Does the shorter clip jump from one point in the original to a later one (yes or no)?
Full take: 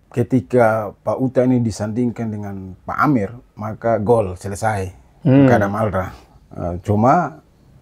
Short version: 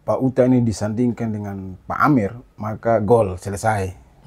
no